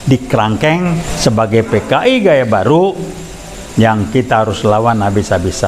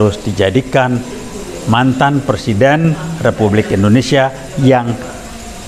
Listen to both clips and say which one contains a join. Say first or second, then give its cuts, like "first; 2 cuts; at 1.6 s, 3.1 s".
first; 1 cut; at 1.1 s